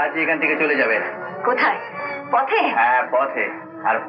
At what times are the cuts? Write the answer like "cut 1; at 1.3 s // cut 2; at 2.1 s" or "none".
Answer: none